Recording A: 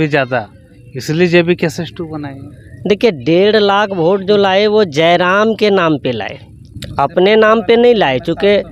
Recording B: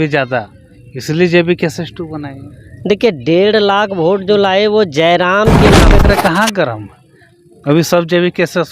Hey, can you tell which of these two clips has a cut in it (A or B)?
B